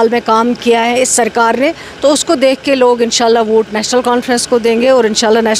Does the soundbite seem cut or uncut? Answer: uncut